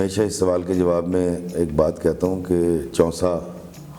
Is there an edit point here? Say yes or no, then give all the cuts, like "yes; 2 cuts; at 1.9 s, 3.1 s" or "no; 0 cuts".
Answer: no; 0 cuts